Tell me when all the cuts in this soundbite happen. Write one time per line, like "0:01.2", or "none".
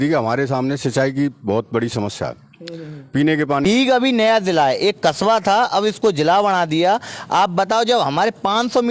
0:03.7